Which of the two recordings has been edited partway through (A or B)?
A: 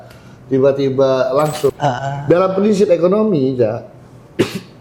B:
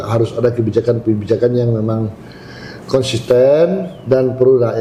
A